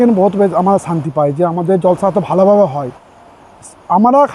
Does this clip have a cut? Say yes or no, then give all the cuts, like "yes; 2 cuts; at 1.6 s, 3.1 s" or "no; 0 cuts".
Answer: no; 0 cuts